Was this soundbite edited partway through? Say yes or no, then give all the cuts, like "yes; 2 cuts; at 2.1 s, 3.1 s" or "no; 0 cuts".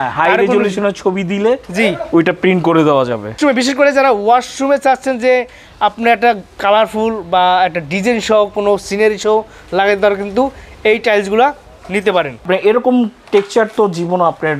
yes; 2 cuts; at 3.3 s, 12.5 s